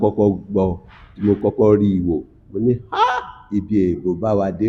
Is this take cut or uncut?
uncut